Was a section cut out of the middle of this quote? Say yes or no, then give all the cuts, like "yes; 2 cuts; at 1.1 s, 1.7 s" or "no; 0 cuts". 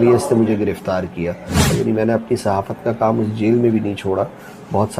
yes; 1 cut; at 1.7 s